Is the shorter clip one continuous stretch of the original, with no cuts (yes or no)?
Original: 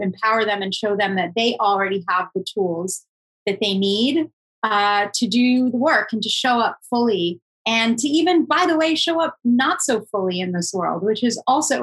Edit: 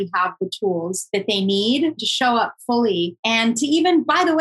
no